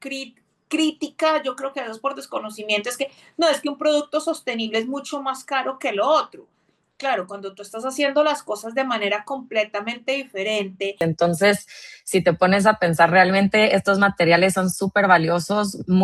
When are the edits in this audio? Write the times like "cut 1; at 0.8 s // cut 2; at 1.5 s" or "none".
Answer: cut 1; at 11.0 s